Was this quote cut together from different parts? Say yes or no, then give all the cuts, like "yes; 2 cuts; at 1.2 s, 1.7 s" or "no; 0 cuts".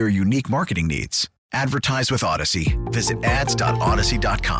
no; 0 cuts